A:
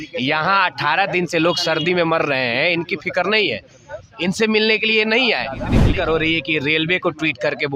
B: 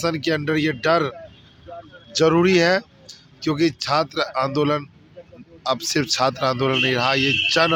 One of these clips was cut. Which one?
A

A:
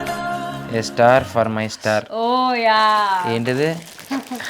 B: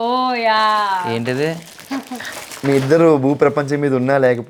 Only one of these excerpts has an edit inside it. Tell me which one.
A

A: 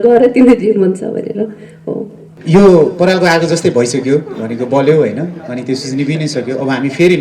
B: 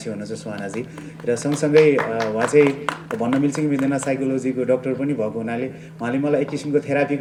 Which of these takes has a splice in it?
A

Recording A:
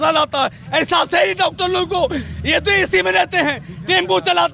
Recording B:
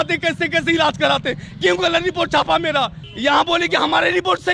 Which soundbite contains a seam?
B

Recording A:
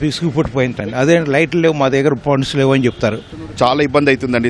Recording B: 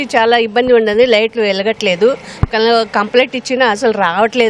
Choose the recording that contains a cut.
A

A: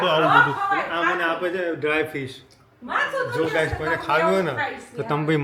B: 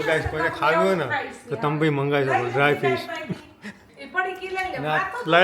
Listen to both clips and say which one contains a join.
B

